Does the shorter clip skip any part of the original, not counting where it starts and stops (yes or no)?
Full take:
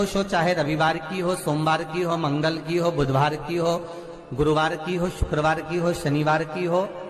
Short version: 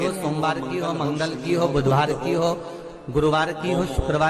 no